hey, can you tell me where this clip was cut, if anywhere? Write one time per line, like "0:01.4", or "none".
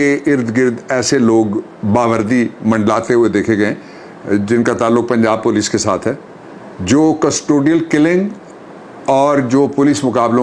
none

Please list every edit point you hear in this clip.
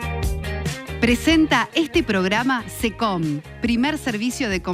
0:01.0

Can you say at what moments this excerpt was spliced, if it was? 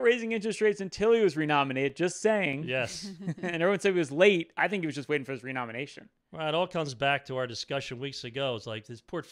none

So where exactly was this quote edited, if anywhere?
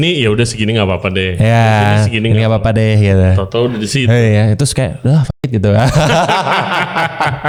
none

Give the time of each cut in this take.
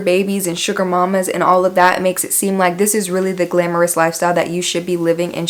none

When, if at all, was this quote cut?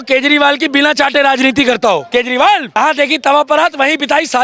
0:02.1
0:02.8

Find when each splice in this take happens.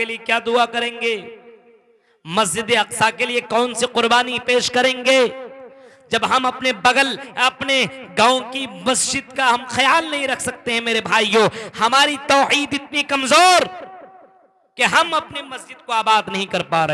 0:07.2

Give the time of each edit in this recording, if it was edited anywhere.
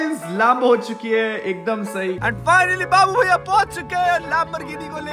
0:02.2

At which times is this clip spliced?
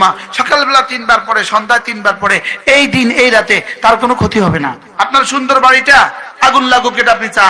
0:04.8

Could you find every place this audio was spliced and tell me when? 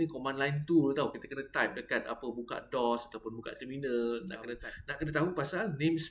0:04.6

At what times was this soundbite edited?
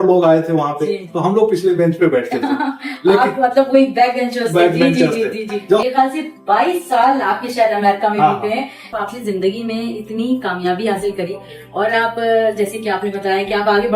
0:05.8
0:08.8

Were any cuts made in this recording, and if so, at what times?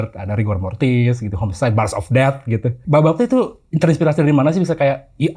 0:02.8

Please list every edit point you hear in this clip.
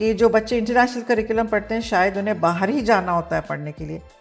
none

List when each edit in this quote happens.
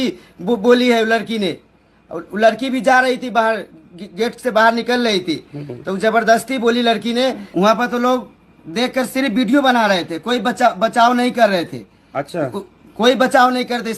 0:07.4

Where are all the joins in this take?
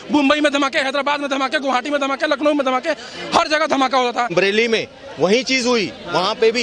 0:04.3

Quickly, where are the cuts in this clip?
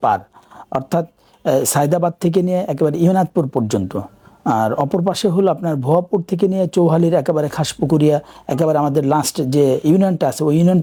none

